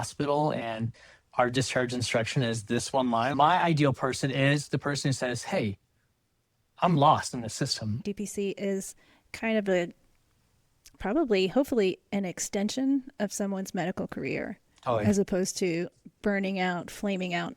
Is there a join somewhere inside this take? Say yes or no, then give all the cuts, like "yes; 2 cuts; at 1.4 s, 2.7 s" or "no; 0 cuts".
yes; 2 cuts; at 3.3 s, 8.0 s